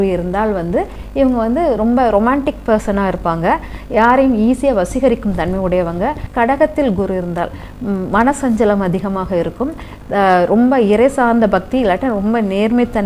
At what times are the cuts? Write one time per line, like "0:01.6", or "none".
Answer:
0:06.2